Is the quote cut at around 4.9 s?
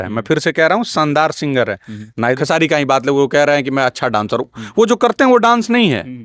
no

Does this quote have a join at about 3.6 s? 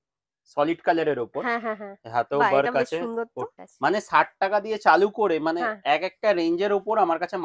yes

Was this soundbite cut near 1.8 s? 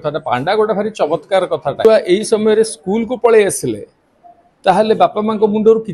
yes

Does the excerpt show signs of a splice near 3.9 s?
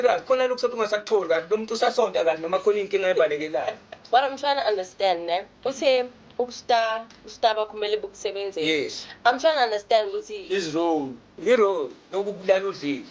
yes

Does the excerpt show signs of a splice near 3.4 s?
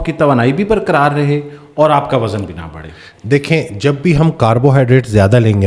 no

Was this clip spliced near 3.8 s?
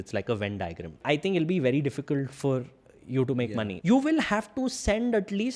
yes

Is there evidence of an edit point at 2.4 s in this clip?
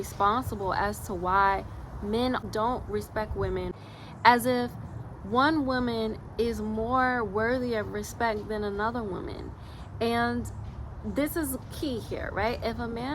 yes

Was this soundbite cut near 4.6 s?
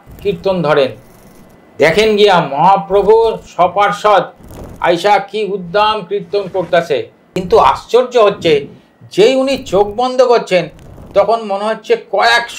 no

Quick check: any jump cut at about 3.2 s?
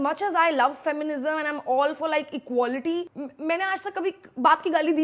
yes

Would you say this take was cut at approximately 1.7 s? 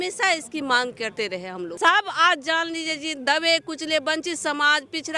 yes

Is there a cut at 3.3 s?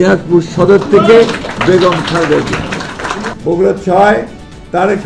yes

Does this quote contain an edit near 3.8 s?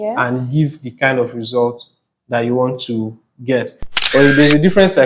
yes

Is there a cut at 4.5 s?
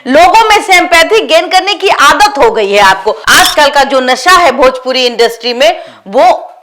no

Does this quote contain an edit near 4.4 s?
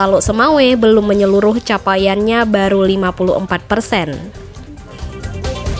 yes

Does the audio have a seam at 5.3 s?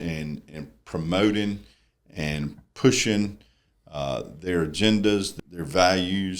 yes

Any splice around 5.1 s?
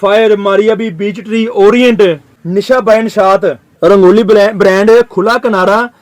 no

